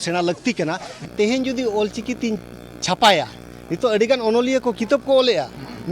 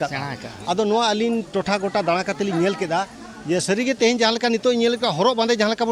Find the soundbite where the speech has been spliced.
first; 1 cut; at 1.1 s

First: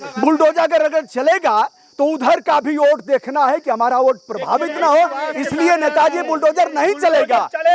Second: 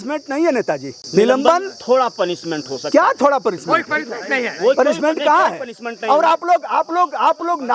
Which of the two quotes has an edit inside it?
second; 1 cut; at 0.9 s

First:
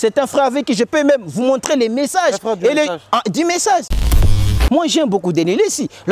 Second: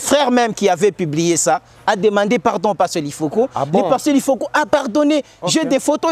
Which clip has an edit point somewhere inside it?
first; 1 cut; at 4.4 s

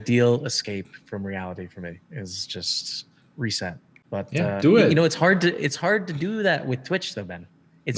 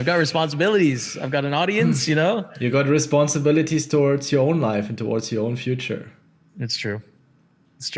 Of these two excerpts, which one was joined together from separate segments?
first; 1 cut; at 3.9 s

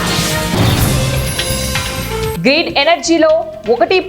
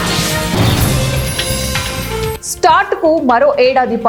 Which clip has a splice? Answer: first; 1 cut; at 2.3 s

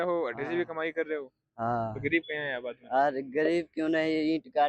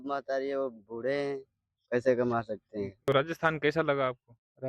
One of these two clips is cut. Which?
second; 1 cut; at 2.9 s

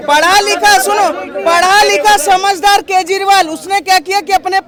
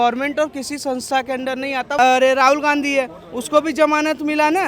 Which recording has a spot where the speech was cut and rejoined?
second; 1 cut; at 2.0 s

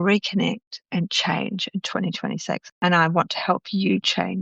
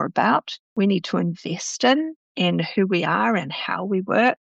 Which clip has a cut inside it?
first; 1 cut; at 2.6 s

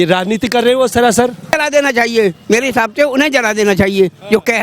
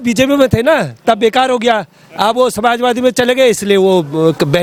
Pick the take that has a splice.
first; 1 cut; at 1.6 s

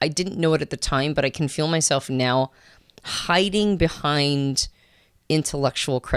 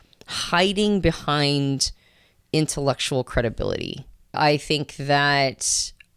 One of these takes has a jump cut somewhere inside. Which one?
second; 1 cut; at 4.4 s

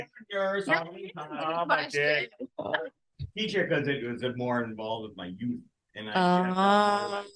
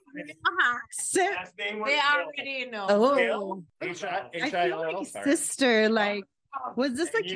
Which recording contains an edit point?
second; 1 cut; at 3.7 s

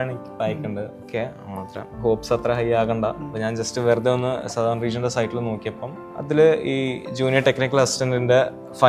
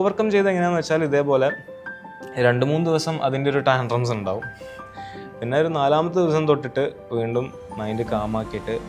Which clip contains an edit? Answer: first; 2 cuts; at 1.1 s, 6.3 s

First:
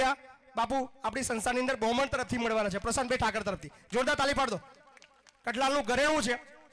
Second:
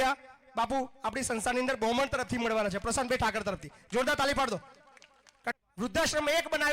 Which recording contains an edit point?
second; 1 cut; at 5.5 s

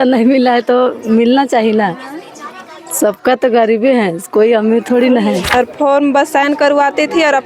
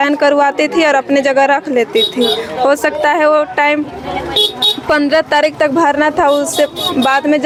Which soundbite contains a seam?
first; 1 cut; at 5.5 s

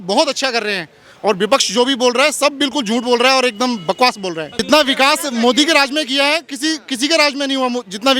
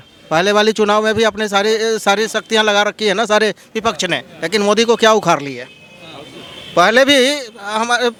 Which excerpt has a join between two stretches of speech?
first; 1 cut; at 4.6 s

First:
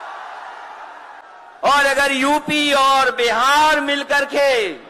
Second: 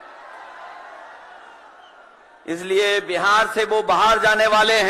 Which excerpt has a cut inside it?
first; 1 cut; at 1.2 s

